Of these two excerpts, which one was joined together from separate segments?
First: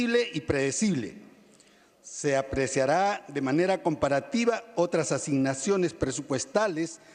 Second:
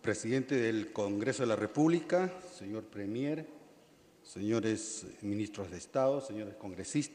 first; 1 cut; at 2.5 s

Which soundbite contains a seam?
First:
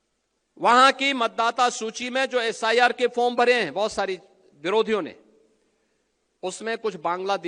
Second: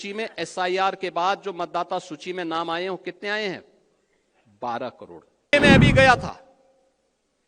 second; 1 cut; at 5.5 s

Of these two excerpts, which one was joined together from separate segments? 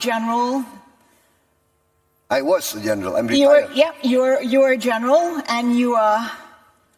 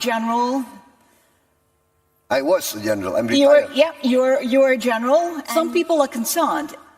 second; 1 cut; at 5.4 s

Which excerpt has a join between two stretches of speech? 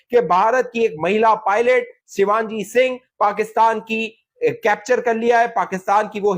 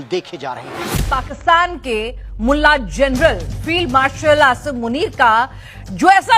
second; 1 cut; at 1.2 s

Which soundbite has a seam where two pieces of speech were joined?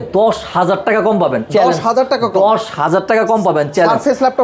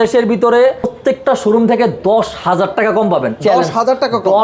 second; 1 cut; at 0.9 s

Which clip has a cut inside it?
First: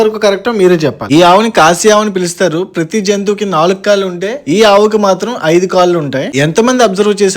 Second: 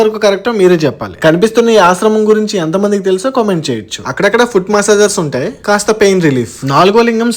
first; 2 cuts; at 1.0 s, 6.2 s

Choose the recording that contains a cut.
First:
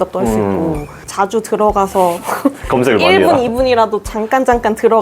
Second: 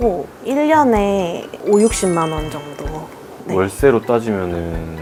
first; 1 cut; at 0.9 s

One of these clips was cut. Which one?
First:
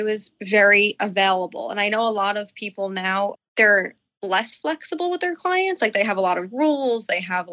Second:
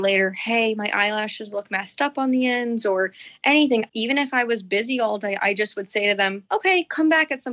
second; 1 cut; at 3.9 s

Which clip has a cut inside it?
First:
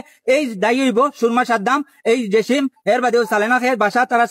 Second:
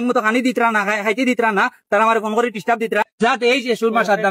second; 1 cut; at 3.3 s

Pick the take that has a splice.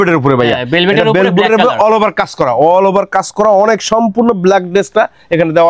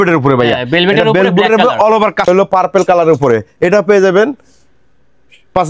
second; 1 cut; at 2.3 s

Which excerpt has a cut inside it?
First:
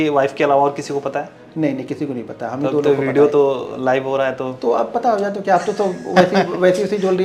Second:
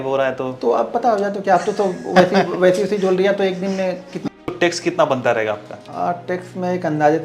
second; 2 cuts; at 4.3 s, 5.8 s

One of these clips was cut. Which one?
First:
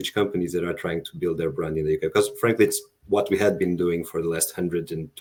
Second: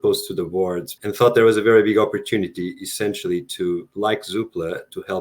second; 1 cut; at 0.9 s

